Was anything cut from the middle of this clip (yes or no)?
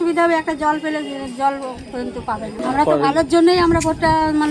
yes